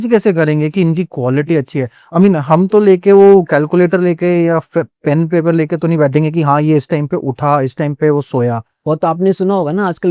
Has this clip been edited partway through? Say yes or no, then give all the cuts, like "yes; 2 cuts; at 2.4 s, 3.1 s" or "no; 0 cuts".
no; 0 cuts